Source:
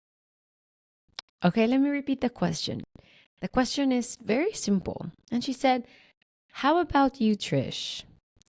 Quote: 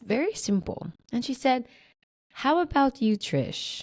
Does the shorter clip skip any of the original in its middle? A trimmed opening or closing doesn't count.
no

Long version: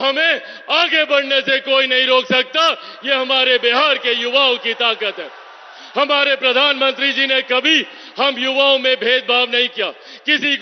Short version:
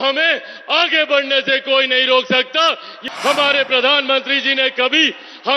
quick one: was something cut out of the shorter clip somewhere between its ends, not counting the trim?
yes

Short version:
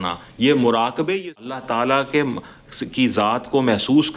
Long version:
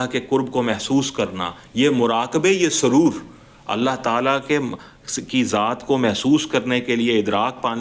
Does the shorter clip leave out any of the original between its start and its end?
yes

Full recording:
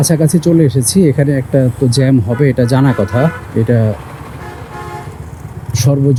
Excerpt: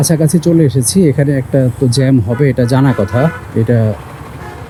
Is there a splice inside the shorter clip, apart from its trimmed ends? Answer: no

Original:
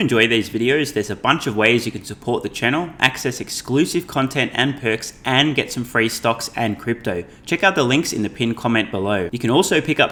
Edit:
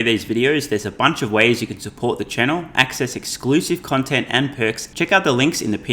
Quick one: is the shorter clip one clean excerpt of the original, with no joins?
no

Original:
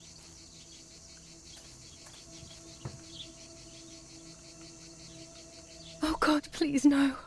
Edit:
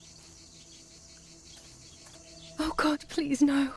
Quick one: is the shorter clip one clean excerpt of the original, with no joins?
no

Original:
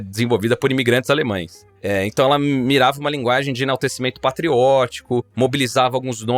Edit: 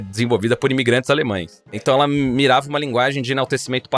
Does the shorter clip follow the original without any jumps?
no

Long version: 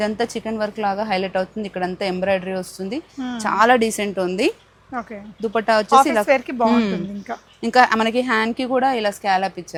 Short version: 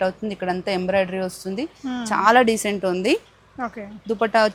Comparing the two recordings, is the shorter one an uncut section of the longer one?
yes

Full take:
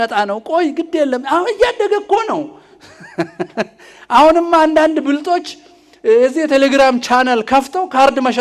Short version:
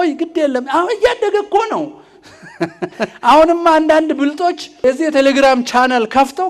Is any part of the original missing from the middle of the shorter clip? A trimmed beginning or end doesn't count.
yes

